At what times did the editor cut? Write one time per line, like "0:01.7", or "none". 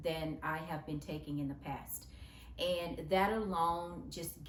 none